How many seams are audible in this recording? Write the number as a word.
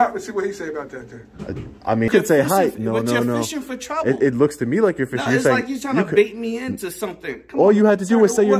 one